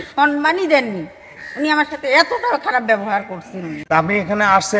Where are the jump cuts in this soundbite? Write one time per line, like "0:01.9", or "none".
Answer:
0:03.8